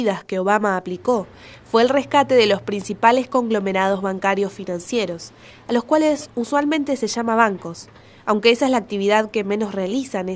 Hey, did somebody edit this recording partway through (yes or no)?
no